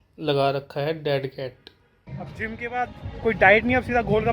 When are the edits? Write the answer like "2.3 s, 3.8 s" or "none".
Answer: 2.0 s